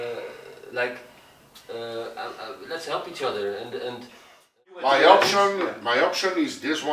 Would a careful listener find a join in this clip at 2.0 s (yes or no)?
no